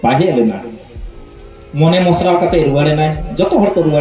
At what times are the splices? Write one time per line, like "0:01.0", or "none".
none